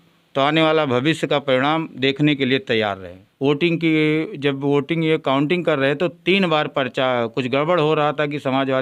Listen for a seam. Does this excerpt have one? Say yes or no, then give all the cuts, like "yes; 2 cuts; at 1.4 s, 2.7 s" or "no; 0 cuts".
yes; 1 cut; at 3.2 s